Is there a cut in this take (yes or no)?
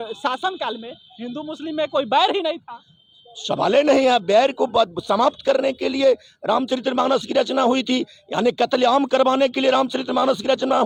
no